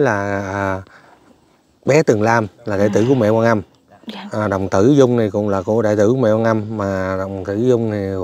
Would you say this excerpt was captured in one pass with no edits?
yes; 0 cuts

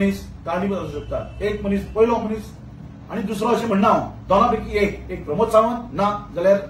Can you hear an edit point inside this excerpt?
no; 0 cuts

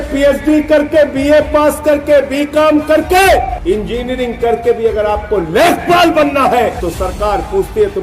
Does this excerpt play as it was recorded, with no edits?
no; 2 cuts; at 3.6 s, 6.8 s

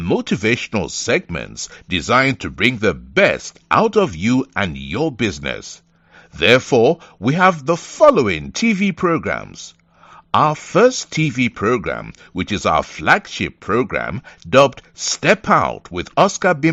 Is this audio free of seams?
yes; 0 cuts

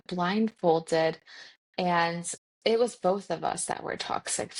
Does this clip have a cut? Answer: no; 0 cuts

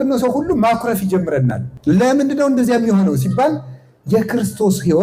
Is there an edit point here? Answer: yes; 1 cut; at 1.7 s

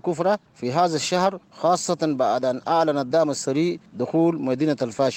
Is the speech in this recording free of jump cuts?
no; 1 cut; at 3.9 s

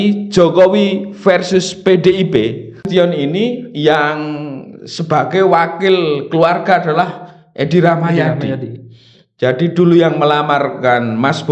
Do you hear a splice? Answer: yes; 1 cut; at 2.9 s

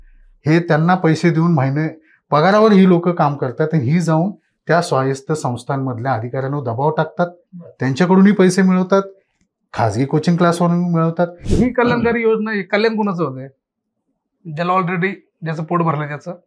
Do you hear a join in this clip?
yes; 1 cut; at 11.4 s

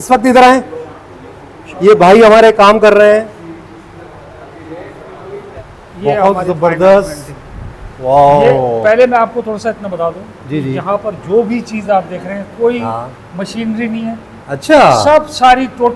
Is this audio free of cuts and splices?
no; 1 cut; at 5.6 s

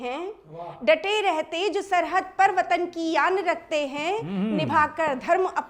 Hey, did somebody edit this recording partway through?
no; 0 cuts

